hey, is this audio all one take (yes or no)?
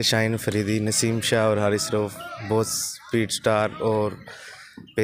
yes